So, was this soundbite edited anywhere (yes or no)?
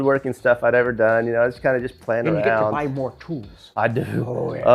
no